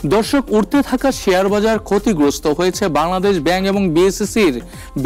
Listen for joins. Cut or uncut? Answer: uncut